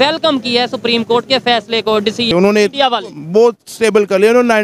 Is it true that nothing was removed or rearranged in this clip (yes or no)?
no